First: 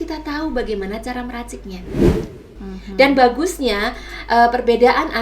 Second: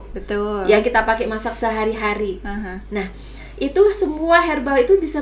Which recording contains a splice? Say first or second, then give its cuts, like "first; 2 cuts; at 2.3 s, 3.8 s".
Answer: first; 1 cut; at 2.2 s